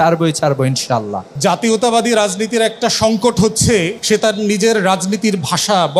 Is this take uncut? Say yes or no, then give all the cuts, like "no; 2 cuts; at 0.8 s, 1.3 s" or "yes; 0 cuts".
no; 2 cuts; at 1.2 s, 3.9 s